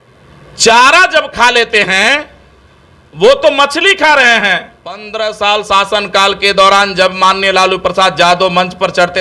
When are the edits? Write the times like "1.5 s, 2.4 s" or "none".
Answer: 5.1 s